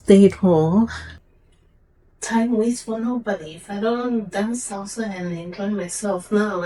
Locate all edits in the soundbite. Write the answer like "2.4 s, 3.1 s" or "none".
1.1 s